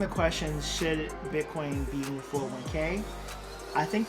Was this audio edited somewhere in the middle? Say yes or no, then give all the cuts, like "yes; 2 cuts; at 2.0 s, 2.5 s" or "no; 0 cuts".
no; 0 cuts